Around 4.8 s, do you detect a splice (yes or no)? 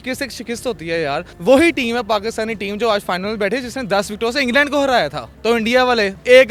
no